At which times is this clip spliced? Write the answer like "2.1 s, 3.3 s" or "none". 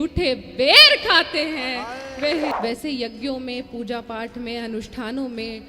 2.5 s